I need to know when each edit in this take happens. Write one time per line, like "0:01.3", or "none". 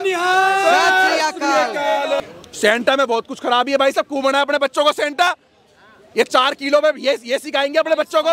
0:02.2